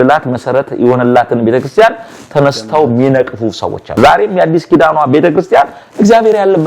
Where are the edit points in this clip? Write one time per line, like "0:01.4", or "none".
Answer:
0:03.9